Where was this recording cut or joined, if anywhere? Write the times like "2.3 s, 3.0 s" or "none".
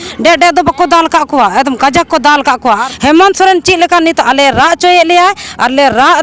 2.9 s